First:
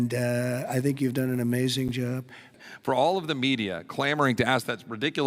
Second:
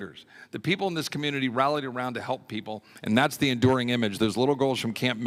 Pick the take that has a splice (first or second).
first